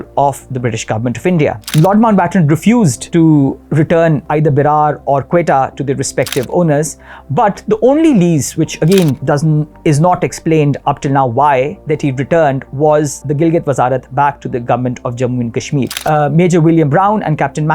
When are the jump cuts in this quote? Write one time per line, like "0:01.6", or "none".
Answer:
0:01.6
0:03.0
0:04.2
0:13.2
0:15.9